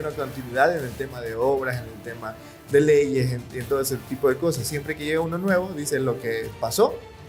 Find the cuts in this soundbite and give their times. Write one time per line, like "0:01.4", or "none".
none